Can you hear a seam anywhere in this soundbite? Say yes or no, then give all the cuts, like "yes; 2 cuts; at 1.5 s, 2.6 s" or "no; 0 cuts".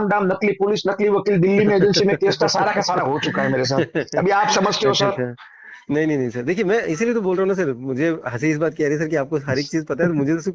no; 0 cuts